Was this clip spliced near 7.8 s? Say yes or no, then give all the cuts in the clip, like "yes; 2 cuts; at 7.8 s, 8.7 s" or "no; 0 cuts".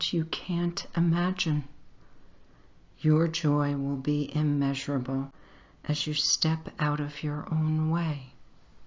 no; 1 cut; at 6.3 s